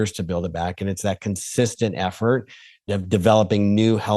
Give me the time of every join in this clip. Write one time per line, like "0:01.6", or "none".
0:02.8